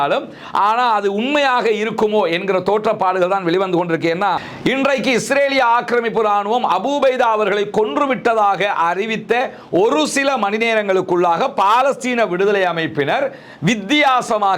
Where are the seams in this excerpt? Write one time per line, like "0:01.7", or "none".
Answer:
none